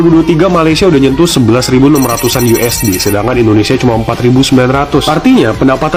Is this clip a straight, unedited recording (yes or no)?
yes